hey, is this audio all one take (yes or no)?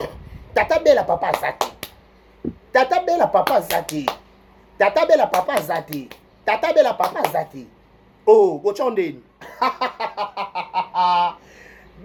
yes